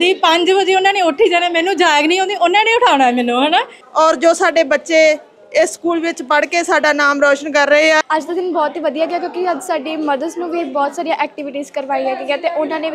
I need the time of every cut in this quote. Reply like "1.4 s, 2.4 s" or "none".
3.8 s, 8.0 s